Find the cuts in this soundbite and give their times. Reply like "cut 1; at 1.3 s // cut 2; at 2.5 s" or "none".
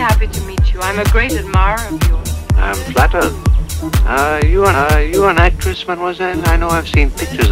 none